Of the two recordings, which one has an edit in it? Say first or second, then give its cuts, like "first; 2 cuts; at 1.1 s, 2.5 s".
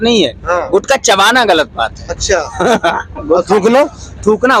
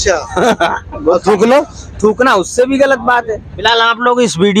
second; 1 cut; at 3.5 s